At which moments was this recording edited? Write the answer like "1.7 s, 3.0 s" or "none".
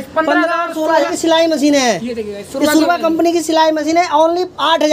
1.1 s